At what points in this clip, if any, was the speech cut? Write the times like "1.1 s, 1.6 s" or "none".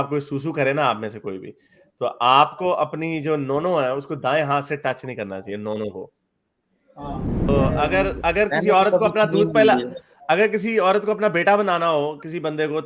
7.5 s